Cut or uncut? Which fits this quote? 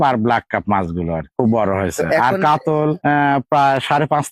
uncut